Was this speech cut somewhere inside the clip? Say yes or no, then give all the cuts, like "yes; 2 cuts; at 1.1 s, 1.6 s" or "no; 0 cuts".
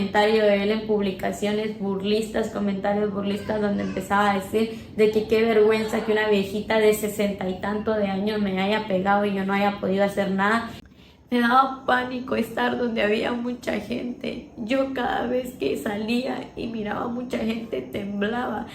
yes; 1 cut; at 10.8 s